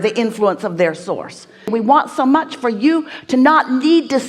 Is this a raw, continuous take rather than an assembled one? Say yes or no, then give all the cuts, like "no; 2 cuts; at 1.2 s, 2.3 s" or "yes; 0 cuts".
no; 1 cut; at 1.7 s